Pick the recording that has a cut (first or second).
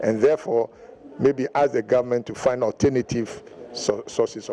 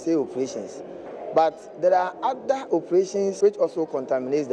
second